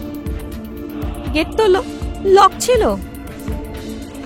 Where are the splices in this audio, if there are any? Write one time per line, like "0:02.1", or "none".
0:01.3
0:03.3